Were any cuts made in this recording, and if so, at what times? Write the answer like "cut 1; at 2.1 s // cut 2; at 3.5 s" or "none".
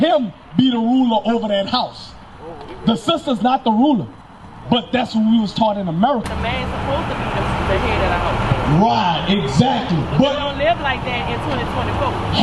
cut 1; at 6.3 s